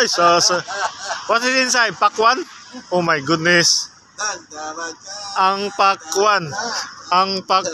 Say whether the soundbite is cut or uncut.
uncut